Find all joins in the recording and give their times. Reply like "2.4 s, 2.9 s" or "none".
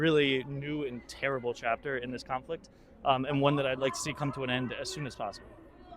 none